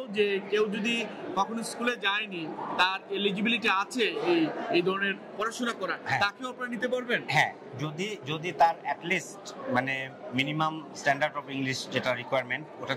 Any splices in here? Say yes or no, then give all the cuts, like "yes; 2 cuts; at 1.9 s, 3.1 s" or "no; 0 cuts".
no; 0 cuts